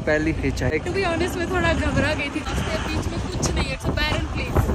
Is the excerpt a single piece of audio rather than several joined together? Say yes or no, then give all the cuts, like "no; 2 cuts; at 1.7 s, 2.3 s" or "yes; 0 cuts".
no; 2 cuts; at 0.7 s, 2.4 s